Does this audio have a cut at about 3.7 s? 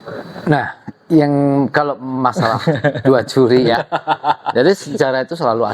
yes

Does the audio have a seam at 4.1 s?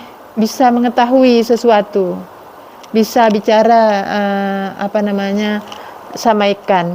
no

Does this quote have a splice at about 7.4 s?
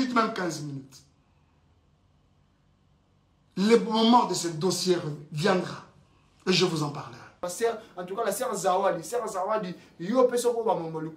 yes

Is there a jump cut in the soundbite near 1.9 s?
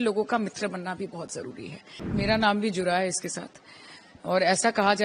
yes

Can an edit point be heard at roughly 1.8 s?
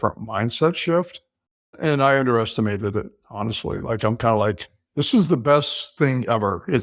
yes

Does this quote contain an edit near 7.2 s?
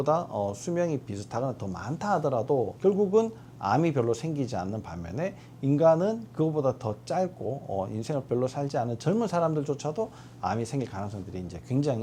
no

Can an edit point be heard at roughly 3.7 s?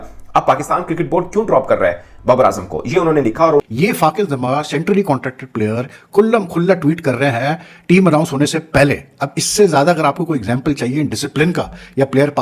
yes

